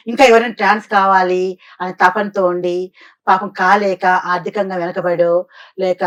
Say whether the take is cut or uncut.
uncut